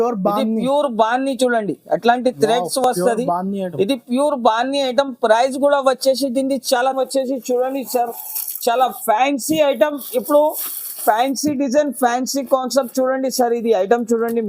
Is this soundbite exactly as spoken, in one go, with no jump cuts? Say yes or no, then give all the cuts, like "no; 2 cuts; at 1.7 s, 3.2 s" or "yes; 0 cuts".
no; 1 cut; at 6.9 s